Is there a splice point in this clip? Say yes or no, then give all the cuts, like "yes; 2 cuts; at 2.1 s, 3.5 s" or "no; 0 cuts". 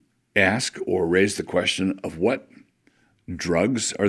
no; 0 cuts